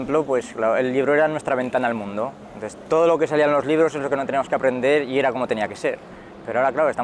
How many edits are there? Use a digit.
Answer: 1